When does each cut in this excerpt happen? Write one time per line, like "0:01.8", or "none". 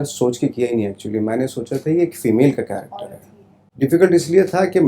0:03.6

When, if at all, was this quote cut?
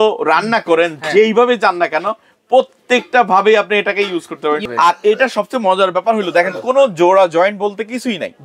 0:04.6

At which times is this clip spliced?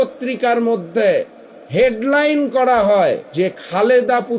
0:03.2

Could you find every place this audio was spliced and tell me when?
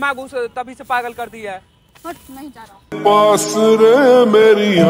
0:02.9

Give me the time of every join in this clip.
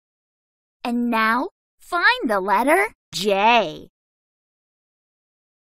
none

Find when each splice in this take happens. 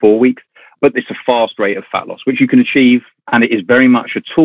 0:03.2

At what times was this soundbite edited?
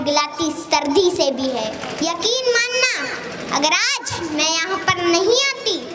0:01.8

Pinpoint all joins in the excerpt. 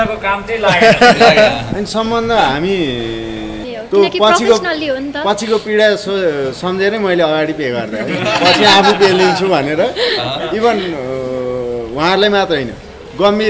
0:03.7

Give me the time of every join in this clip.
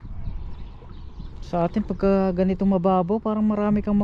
none

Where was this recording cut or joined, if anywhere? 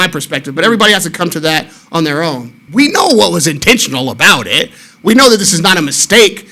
0:02.5

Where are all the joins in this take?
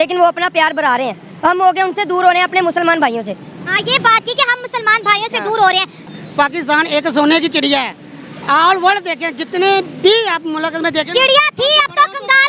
0:06.1

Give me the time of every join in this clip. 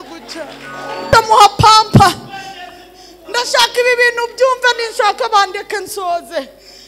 0:01.1

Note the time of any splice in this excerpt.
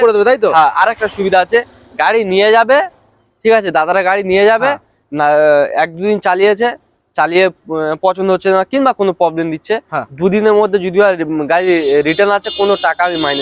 none

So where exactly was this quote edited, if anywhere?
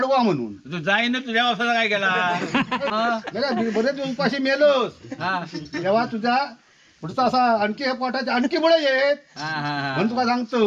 0:02.9

